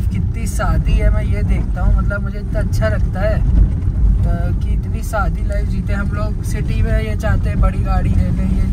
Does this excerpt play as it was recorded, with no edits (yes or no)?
yes